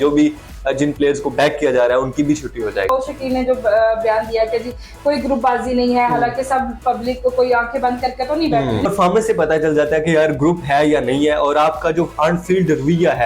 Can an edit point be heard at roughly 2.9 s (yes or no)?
yes